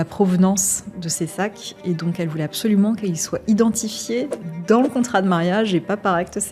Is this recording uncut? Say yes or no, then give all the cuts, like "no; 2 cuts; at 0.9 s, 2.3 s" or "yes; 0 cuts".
yes; 0 cuts